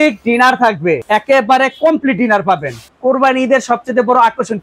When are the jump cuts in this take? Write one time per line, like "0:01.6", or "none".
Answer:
0:01.0
0:02.8